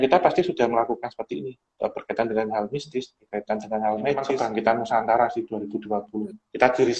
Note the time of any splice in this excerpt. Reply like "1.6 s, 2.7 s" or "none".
4.3 s

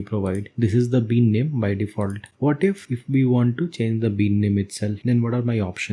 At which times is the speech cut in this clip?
5.0 s

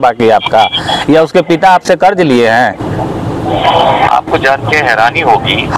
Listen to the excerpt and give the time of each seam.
none

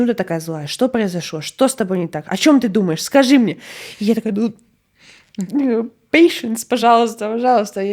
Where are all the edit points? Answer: none

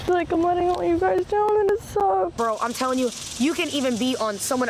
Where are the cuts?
2.3 s

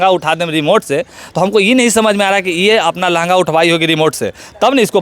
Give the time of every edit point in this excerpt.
none

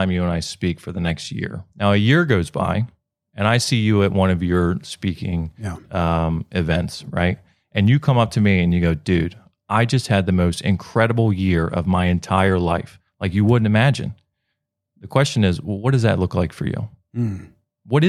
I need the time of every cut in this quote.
1.6 s

